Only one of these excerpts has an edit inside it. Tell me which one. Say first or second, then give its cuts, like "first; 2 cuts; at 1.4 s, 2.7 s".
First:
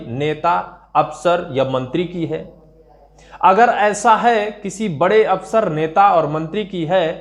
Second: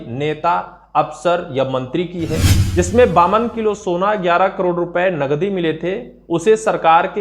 second; 1 cut; at 2.6 s